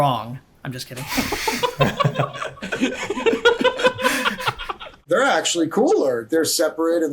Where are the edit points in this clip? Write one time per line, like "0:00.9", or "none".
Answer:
0:04.9